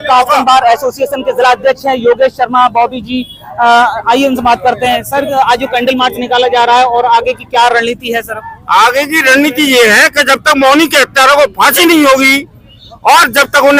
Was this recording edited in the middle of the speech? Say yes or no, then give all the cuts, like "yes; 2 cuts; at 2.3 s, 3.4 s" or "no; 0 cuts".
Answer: no; 0 cuts